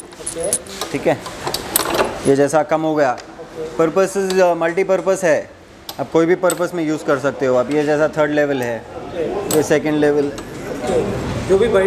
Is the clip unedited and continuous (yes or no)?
yes